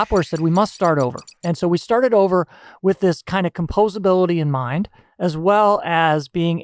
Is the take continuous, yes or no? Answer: yes